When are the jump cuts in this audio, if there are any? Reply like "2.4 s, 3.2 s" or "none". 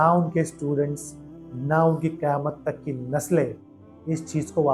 none